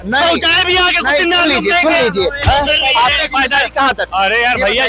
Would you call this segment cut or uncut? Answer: cut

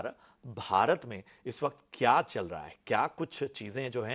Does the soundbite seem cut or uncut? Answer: uncut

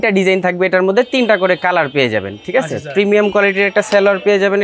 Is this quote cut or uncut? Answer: uncut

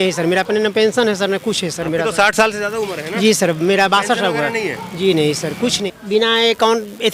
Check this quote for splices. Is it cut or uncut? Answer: cut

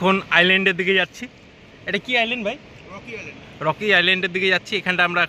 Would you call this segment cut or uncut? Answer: uncut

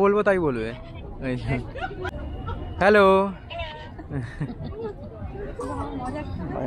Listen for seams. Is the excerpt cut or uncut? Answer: cut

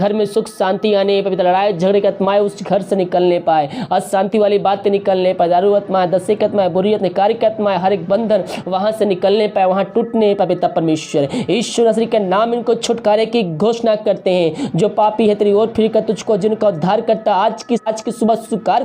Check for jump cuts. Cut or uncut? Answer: cut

